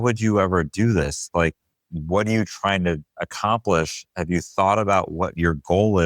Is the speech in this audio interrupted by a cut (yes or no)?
no